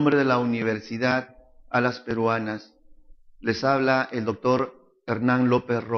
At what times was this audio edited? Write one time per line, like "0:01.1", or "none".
none